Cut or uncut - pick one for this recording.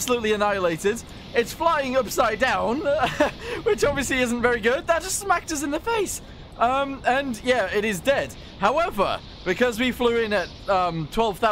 uncut